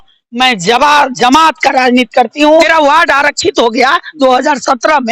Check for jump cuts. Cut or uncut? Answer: cut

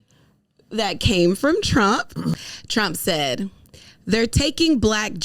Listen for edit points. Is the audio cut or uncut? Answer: cut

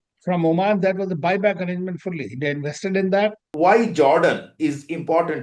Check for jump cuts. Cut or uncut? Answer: cut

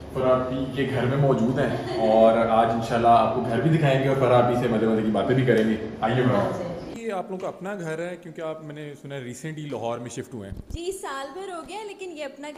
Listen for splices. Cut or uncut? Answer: cut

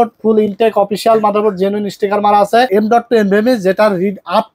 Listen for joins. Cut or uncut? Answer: cut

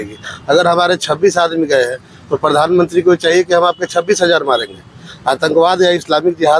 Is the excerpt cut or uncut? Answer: uncut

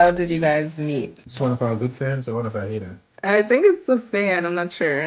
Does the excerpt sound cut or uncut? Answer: cut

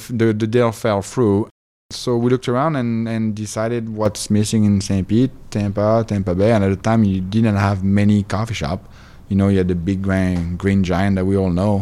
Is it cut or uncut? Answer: uncut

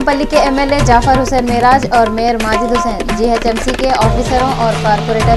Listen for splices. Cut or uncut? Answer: uncut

